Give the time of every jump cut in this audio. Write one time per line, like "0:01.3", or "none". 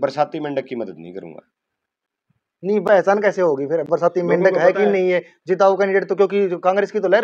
none

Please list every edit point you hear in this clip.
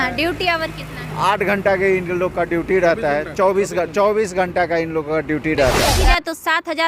0:05.9

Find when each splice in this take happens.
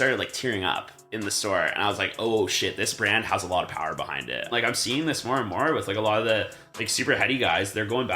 0:04.4

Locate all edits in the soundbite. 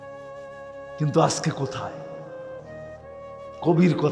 0:01.0

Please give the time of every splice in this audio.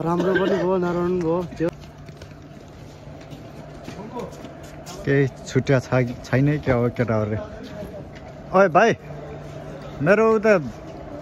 0:01.7

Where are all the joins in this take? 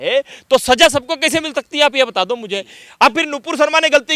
0:02.8

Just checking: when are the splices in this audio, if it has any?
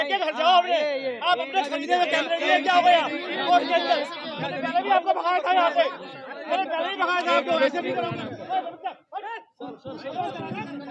none

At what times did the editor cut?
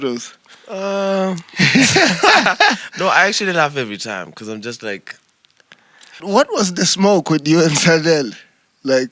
0:06.2

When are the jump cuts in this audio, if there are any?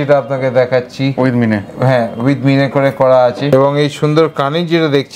0:03.5

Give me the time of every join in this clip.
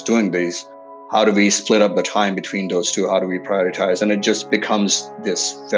0:01.0
0:04.5

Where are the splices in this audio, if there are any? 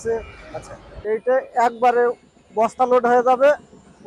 none

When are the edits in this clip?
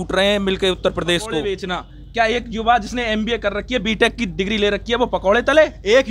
0:01.5

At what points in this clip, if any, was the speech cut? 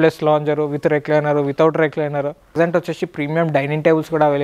0:02.6

